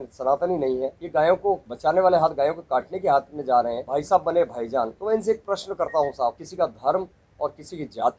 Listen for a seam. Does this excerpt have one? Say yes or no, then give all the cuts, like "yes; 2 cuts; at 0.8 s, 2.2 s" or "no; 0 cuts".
yes; 5 cuts; at 1.0 s, 1.7 s, 3.8 s, 5.0 s, 6.4 s